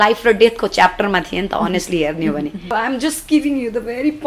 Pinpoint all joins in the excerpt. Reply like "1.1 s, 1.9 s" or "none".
2.7 s